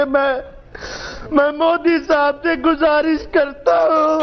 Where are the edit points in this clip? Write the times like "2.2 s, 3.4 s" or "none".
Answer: none